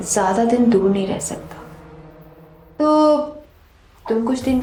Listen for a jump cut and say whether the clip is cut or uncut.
uncut